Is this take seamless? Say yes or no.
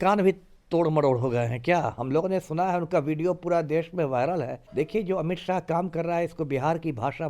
no